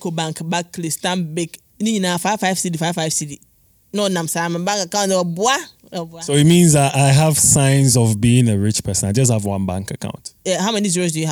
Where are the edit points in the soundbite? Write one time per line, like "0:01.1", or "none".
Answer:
0:10.4